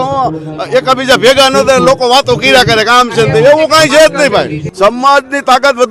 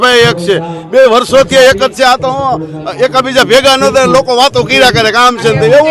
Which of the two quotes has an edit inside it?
first; 1 cut; at 4.6 s

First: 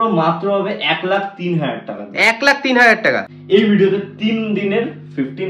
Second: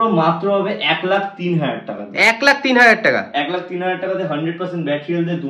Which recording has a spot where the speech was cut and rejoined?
first; 1 cut; at 3.3 s

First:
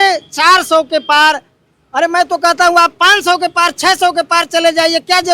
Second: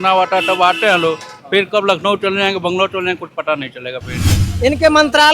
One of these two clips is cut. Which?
second; 1 cut; at 4.4 s

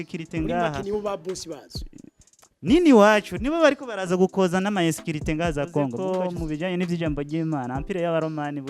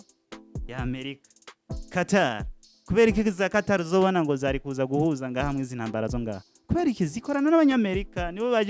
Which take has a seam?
first; 1 cut; at 6.0 s

